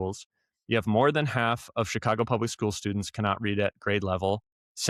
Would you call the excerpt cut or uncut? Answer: uncut